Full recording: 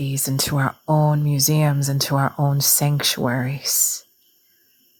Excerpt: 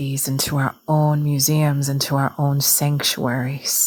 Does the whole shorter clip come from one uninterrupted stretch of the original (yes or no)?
yes